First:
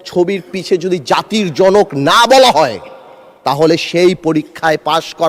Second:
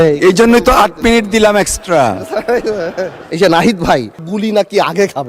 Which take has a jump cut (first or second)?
second